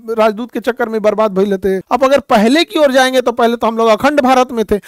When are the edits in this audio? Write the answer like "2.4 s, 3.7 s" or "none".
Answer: 1.8 s